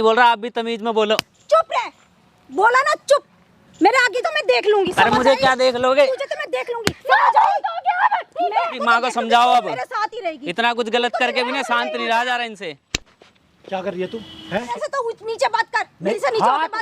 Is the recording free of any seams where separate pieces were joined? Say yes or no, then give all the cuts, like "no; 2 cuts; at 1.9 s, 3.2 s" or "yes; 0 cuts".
no; 3 cuts; at 4.2 s, 8.8 s, 14.7 s